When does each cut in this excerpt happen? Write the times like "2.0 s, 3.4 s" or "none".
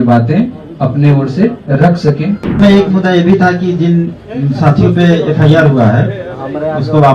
2.6 s